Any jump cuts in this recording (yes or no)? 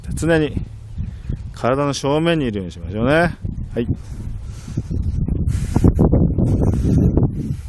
yes